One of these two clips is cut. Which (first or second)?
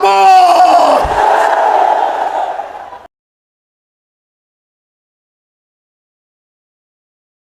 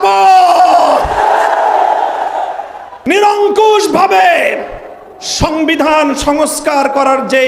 second